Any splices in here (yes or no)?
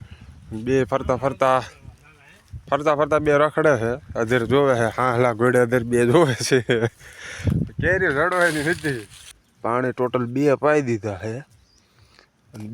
yes